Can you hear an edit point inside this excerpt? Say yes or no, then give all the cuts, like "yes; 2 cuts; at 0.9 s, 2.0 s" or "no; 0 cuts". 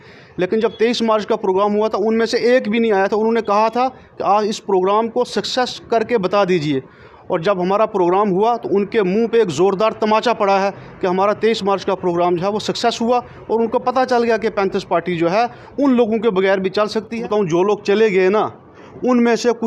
yes; 1 cut; at 17.2 s